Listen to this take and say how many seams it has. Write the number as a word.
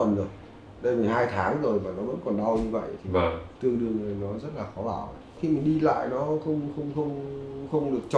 two